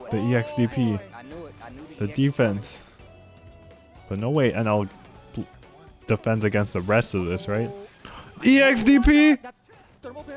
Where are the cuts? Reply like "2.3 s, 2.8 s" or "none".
none